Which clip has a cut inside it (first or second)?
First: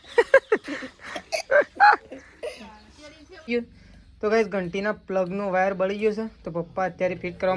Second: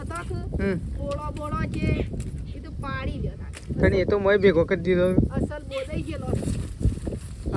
first